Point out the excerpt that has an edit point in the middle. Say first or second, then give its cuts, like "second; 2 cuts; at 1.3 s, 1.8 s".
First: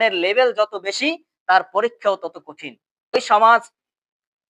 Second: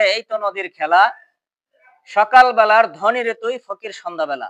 first; 1 cut; at 3.1 s